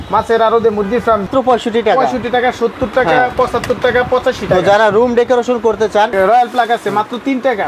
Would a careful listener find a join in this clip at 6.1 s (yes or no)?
yes